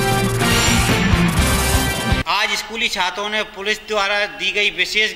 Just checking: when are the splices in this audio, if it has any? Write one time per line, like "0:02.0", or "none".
0:02.2